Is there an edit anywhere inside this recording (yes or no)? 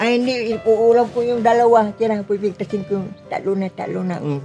no